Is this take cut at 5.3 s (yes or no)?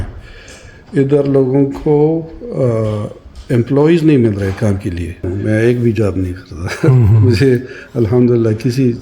yes